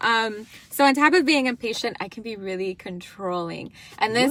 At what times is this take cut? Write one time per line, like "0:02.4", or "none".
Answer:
none